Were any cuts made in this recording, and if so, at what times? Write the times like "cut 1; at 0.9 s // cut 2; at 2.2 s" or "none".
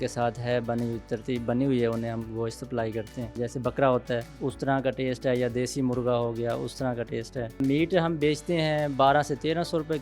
cut 1; at 3.4 s // cut 2; at 4.3 s // cut 3; at 7.6 s